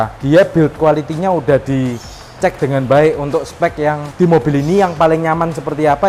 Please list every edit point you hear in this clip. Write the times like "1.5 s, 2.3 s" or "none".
none